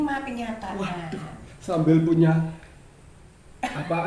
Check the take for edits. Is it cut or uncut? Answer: uncut